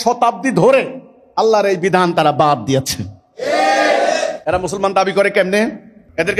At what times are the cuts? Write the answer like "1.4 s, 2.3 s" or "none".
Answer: none